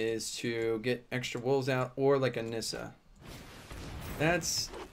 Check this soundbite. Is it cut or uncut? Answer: uncut